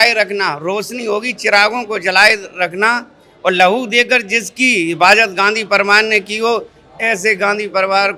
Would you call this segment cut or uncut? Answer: uncut